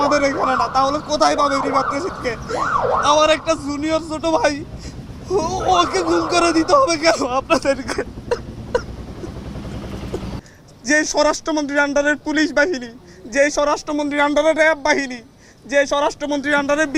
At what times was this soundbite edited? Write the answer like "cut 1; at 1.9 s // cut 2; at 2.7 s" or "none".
cut 1; at 10.5 s